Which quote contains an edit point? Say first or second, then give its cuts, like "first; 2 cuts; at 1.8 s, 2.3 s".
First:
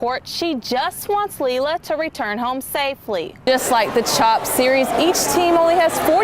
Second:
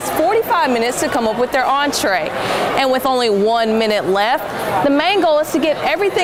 first; 1 cut; at 3.4 s